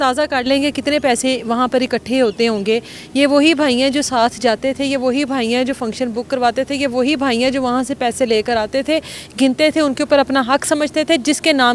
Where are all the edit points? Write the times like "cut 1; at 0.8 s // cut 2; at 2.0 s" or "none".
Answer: none